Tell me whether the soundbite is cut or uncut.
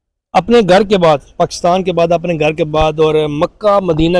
uncut